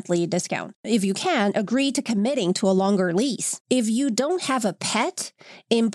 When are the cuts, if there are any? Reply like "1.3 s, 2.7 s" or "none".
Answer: 0.8 s, 3.6 s